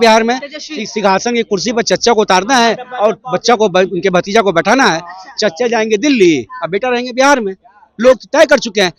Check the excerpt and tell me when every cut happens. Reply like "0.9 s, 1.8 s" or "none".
none